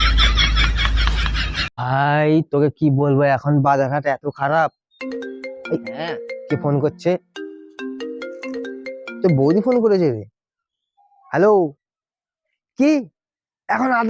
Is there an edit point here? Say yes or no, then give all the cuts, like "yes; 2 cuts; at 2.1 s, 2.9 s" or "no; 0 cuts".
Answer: yes; 1 cut; at 1.7 s